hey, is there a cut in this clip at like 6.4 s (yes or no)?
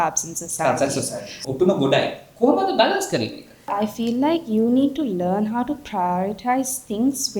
no